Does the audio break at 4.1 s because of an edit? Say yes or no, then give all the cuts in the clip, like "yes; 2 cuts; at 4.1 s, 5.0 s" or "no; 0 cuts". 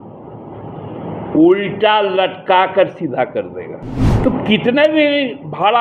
yes; 1 cut; at 4.1 s